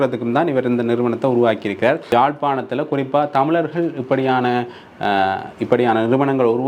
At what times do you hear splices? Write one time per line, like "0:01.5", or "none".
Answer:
0:02.0